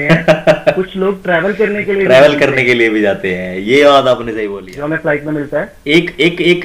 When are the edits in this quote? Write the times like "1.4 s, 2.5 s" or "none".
4.5 s